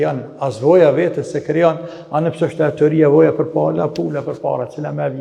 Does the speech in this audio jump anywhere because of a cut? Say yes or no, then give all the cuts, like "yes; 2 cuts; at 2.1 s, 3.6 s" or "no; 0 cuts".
no; 0 cuts